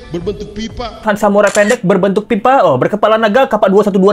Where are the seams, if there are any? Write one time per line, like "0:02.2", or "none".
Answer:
0:01.0